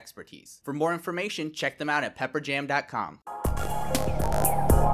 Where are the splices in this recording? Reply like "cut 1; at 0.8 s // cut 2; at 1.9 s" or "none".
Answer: cut 1; at 3.2 s